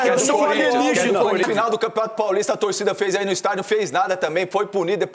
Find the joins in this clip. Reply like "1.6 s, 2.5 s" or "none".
1.4 s